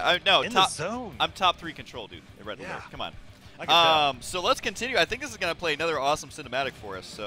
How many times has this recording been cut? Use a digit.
1